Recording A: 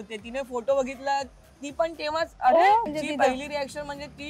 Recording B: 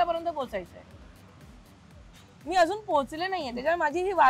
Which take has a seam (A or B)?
A